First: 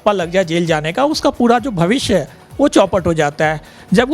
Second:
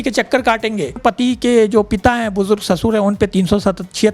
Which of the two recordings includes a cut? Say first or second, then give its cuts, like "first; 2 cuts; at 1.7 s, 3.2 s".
second; 1 cut; at 1.0 s